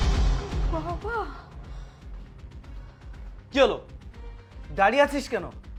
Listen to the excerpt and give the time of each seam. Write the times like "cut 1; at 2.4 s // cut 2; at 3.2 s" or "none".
none